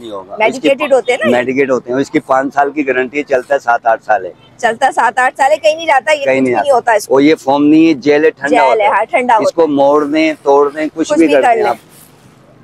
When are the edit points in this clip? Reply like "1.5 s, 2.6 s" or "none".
none